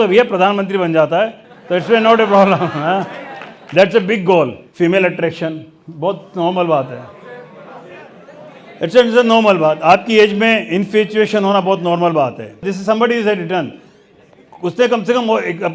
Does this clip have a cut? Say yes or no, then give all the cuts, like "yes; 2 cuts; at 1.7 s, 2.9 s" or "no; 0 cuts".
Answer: yes; 2 cuts; at 4.6 s, 12.7 s